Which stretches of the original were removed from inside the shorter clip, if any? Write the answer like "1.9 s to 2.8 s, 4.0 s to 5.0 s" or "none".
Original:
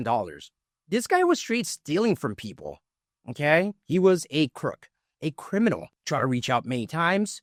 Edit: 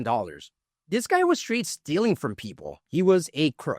2.8 s to 3.8 s